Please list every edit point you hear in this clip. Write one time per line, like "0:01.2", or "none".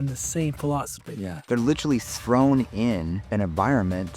0:01.5